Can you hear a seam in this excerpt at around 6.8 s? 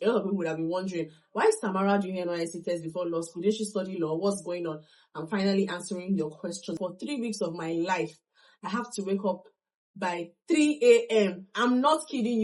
yes; 1 cut; at 6.8 s

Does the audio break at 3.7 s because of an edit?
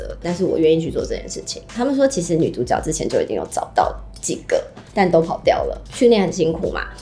no; 2 cuts; at 1.7 s, 5.9 s

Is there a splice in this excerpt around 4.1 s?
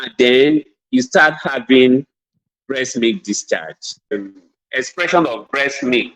yes; 1 cut; at 4.1 s

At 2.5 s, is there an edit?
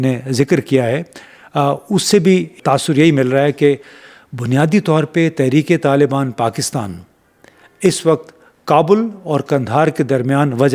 yes; 1 cut; at 2.5 s

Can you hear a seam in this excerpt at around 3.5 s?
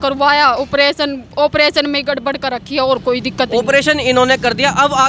no; 0 cuts

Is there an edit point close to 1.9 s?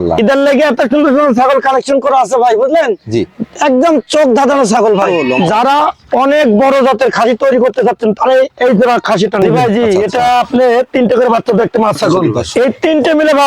no; 3 cuts; at 5.1 s, 9.5 s, 12.4 s

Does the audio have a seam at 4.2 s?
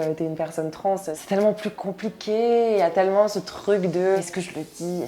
yes; 2 cuts; at 1.2 s, 4.2 s

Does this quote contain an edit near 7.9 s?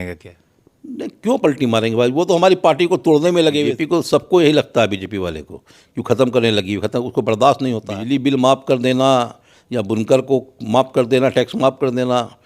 yes; 2 cuts; at 3.7 s, 7.9 s

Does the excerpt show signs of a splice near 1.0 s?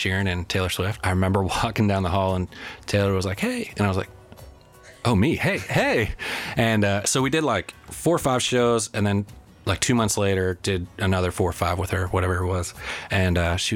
yes; 1 cut; at 1.0 s

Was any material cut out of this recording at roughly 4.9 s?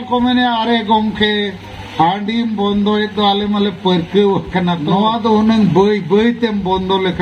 yes; 1 cut; at 4.9 s

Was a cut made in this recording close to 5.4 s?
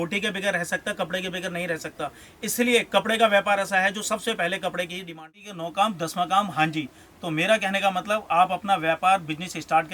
yes; 1 cut; at 5.4 s

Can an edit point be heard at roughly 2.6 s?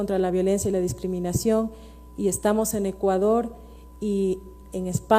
no; 0 cuts

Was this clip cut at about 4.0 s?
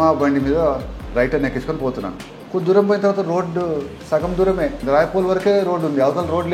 yes; 2 cuts; at 4.0 s, 4.8 s

